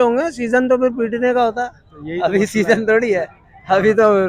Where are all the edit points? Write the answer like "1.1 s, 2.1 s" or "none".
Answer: none

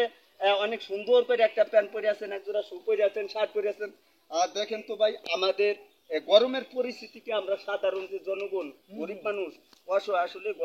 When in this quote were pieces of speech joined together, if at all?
none

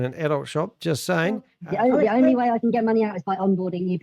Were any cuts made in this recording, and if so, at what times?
1.5 s

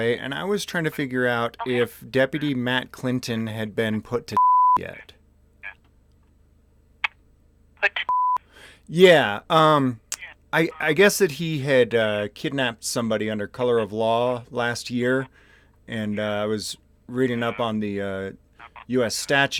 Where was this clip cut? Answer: none

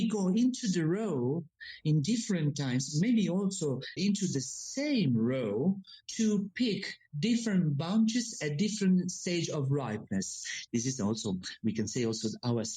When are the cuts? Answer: 4.0 s, 6.0 s, 10.6 s

